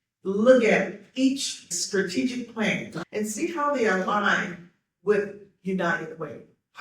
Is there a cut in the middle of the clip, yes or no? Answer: yes